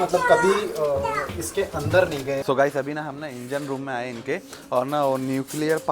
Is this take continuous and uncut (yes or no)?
no